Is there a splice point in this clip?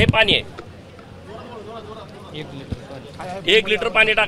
no; 0 cuts

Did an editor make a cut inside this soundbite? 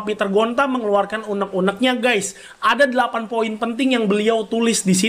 no; 0 cuts

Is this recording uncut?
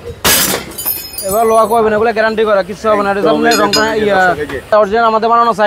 no; 1 cut; at 4.7 s

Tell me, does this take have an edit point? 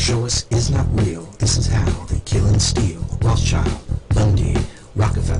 no; 0 cuts

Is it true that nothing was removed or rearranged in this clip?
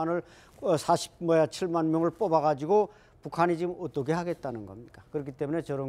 yes; 0 cuts

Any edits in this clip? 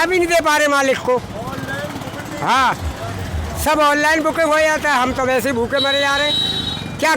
no; 0 cuts

